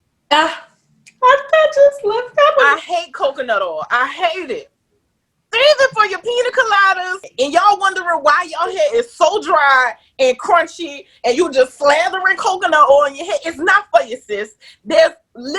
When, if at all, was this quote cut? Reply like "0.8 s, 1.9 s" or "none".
7.2 s

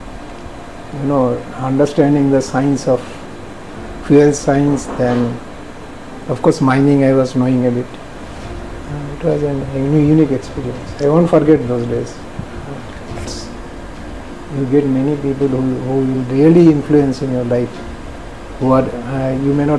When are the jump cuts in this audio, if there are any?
13.3 s

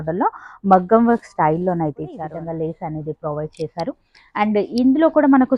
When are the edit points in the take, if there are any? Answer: 2.2 s

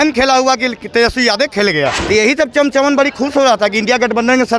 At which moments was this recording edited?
2.0 s

